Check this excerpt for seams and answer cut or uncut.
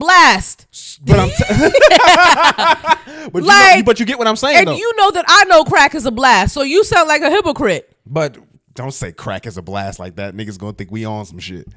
uncut